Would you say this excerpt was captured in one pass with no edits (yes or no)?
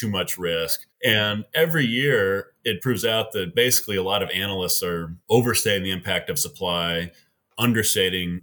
yes